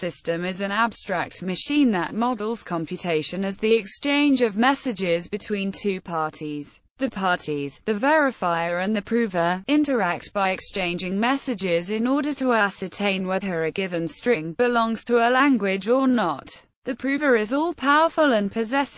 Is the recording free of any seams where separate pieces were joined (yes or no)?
no